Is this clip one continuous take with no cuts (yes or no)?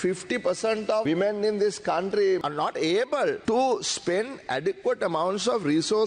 no